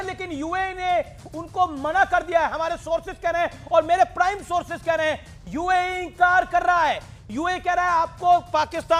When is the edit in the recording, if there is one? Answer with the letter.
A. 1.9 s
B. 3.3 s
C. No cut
C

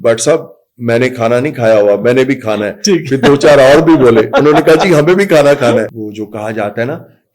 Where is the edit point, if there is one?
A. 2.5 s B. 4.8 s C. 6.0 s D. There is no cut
C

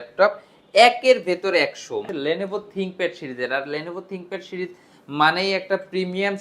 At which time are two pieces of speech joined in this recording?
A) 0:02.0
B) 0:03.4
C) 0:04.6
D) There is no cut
A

